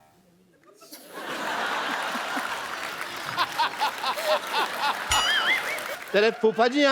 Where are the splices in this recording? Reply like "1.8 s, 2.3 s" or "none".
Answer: 6.0 s

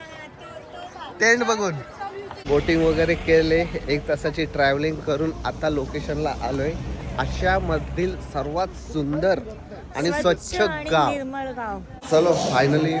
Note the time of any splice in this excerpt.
2.3 s, 11.9 s

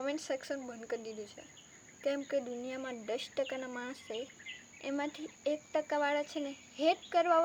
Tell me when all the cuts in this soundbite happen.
none

